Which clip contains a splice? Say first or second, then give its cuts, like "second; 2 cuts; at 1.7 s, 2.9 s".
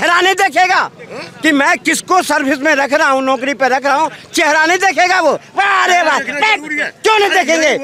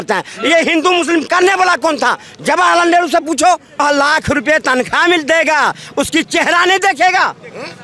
second; 1 cut; at 3.8 s